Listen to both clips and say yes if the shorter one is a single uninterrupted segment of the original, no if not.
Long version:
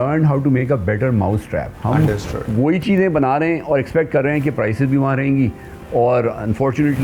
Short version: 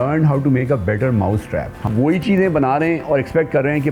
no